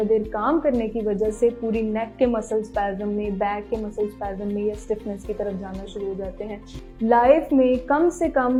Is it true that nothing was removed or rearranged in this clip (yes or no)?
yes